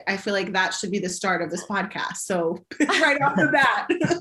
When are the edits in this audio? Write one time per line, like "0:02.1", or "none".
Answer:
none